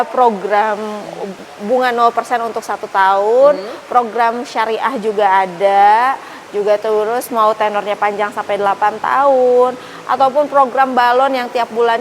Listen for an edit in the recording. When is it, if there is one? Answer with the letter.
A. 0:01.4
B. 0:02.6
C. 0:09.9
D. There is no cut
A